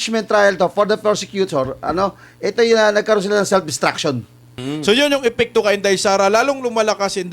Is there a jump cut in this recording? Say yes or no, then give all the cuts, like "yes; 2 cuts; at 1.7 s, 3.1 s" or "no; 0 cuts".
yes; 1 cut; at 4.6 s